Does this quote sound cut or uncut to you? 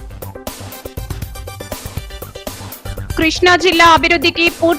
cut